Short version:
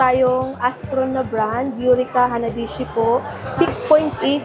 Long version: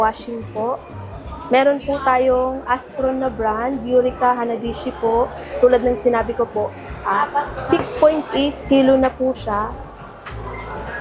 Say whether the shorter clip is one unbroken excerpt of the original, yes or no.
no